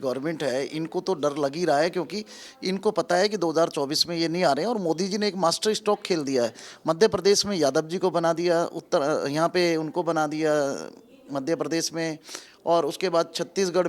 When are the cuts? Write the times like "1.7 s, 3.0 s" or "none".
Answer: none